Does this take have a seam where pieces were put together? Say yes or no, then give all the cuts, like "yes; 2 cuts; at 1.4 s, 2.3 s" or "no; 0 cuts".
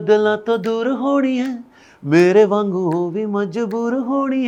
no; 0 cuts